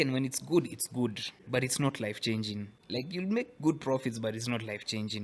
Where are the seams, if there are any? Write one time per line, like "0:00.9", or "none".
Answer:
0:01.3
0:02.7